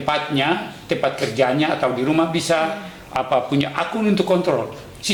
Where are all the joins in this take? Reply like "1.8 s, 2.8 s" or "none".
none